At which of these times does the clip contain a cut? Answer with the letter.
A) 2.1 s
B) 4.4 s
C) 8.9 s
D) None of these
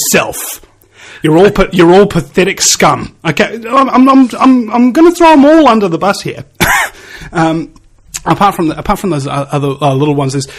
B